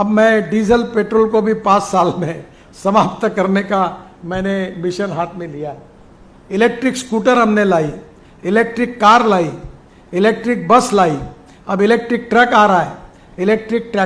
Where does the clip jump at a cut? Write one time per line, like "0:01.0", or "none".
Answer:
none

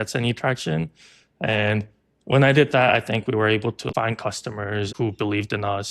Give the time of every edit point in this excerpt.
0:03.8
0:04.9

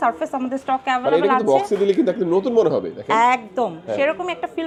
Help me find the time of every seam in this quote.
none

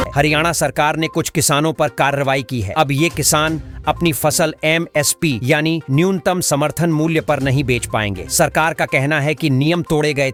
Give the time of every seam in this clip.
none

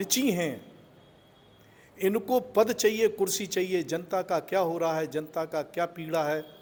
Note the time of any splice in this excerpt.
none

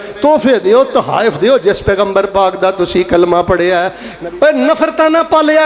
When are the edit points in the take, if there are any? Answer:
0:04.0

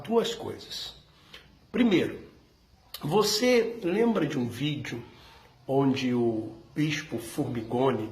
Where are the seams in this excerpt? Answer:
0:03.7

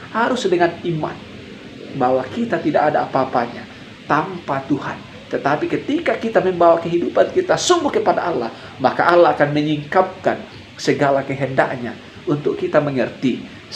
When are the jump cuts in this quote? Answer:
none

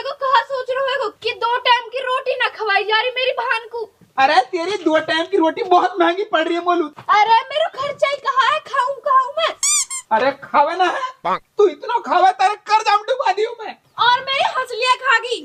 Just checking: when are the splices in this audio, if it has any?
none

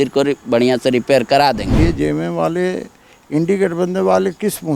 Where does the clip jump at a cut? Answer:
0:01.7

